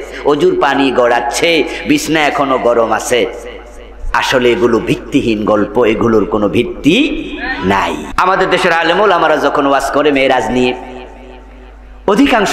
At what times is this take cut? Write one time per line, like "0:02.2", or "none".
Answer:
0:08.1

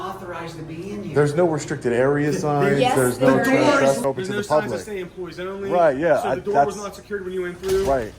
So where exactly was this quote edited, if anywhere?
0:04.0

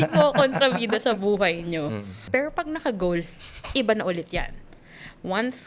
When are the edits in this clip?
0:02.1

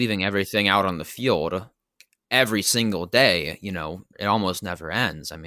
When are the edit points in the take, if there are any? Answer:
0:01.9
0:03.6

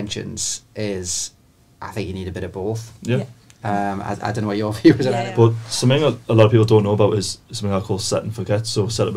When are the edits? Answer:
0:05.2

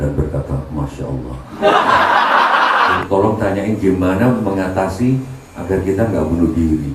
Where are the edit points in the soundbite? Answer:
0:03.0

